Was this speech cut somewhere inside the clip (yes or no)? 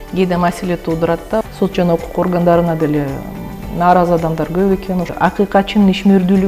yes